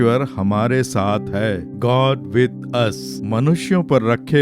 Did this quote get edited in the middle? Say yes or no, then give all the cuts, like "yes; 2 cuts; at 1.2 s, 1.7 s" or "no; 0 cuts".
yes; 1 cut; at 3.1 s